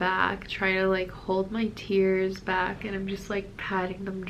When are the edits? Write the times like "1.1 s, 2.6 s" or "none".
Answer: none